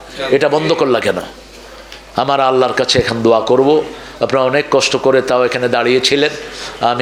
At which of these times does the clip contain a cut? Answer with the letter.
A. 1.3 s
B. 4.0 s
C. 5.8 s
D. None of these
D